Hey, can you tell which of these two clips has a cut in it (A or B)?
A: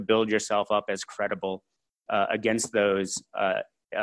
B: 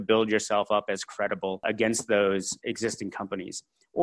B